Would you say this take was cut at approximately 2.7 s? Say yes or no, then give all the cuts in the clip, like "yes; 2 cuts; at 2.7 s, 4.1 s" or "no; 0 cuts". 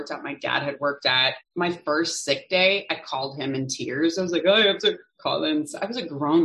no; 1 cut; at 1.3 s